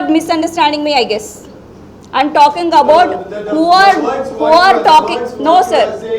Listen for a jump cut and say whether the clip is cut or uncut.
uncut